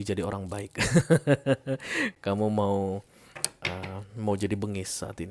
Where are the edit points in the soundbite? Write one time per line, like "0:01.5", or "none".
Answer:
none